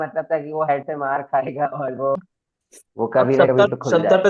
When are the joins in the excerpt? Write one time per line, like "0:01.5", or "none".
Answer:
0:02.2